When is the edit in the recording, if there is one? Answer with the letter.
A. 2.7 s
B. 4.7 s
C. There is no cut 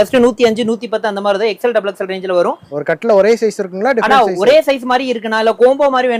A